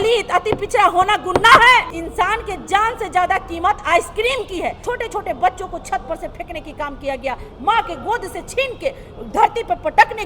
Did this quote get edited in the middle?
yes; 2 cuts; at 2.0 s, 4.8 s

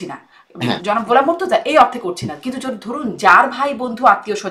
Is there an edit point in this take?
no; 0 cuts

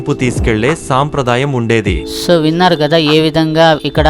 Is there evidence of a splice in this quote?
yes; 1 cut; at 2.0 s

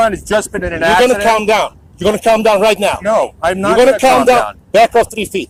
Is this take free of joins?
yes; 0 cuts

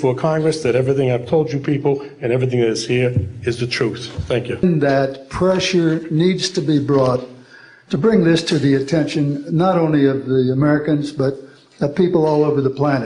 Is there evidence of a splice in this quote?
yes; 1 cut; at 4.6 s

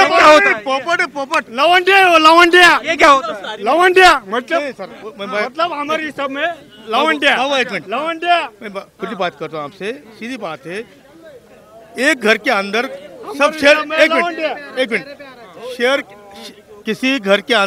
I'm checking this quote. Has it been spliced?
no; 0 cuts

